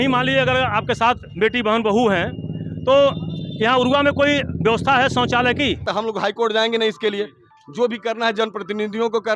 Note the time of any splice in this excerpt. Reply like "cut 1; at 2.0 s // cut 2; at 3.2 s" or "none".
cut 1; at 5.9 s